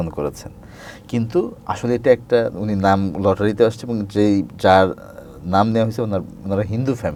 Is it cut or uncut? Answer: uncut